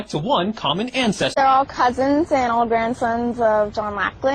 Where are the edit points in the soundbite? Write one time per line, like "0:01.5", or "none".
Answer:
0:01.4